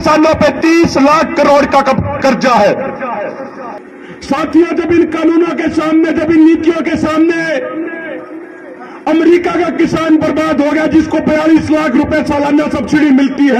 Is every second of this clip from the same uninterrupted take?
no; 1 cut; at 3.8 s

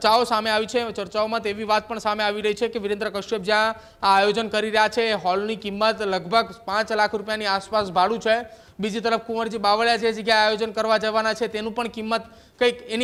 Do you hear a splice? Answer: no; 0 cuts

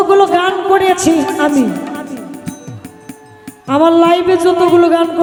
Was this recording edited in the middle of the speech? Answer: no; 0 cuts

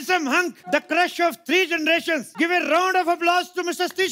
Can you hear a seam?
yes; 2 cuts; at 0.7 s, 2.3 s

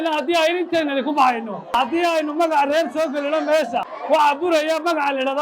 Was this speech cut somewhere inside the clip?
yes; 2 cuts; at 1.9 s, 4.3 s

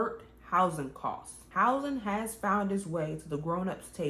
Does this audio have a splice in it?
yes; 1 cut; at 1.3 s

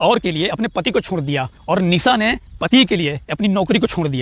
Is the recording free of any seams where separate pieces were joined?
yes; 0 cuts

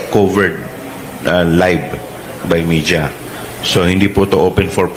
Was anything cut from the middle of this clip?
no; 0 cuts

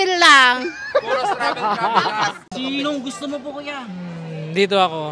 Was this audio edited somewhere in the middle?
yes; 1 cut; at 2.5 s

